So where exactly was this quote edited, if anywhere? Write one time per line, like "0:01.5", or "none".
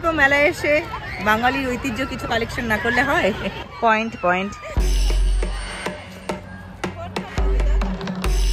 none